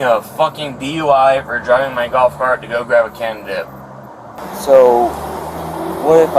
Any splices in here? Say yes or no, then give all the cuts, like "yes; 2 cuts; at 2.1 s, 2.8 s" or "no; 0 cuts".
yes; 1 cut; at 4.4 s